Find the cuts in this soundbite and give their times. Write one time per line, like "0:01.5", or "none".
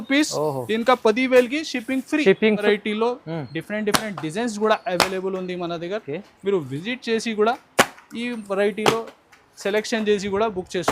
0:02.6